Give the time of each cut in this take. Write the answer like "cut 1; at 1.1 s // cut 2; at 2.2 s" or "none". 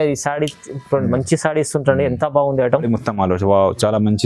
cut 1; at 2.8 s